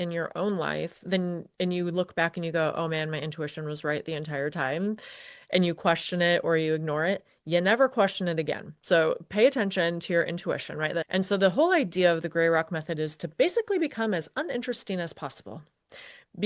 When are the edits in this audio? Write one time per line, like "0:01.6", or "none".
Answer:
0:11.1